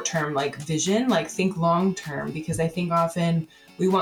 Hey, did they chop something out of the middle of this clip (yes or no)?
no